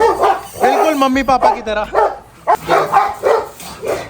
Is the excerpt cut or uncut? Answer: cut